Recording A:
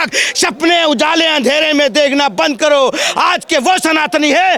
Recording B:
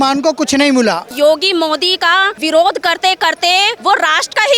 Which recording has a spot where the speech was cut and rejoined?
B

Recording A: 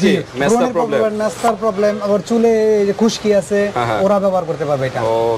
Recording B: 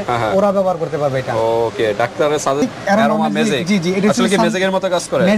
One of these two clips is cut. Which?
B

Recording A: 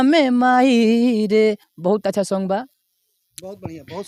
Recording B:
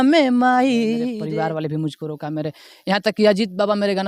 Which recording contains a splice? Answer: B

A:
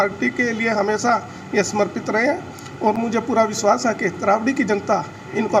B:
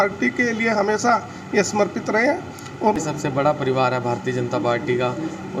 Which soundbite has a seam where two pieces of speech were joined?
B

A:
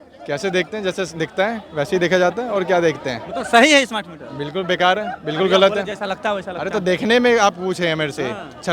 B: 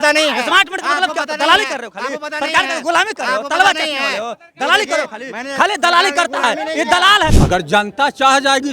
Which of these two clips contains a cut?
B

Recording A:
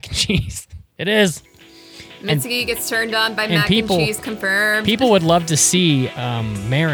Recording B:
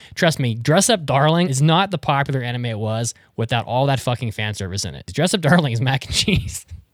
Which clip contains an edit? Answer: B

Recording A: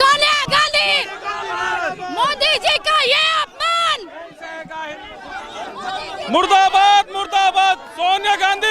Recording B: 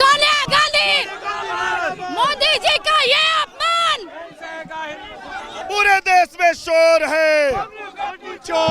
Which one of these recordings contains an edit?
B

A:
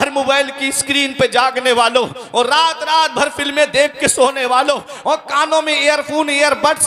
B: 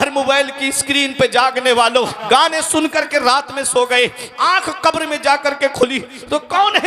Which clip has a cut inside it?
B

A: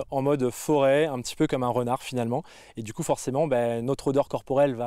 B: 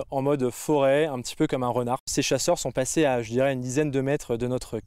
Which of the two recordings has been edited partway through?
B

